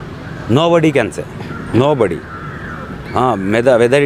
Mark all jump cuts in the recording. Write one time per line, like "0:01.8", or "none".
none